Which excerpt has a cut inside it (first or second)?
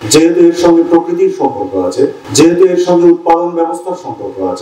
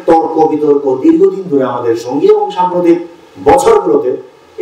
first